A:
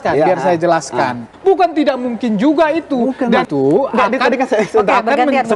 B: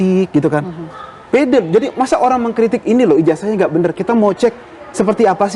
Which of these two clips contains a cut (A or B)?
A